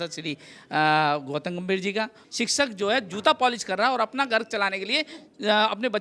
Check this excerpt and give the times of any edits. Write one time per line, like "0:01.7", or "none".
0:02.2